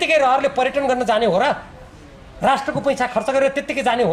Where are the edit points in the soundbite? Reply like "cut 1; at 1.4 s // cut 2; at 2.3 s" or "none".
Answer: none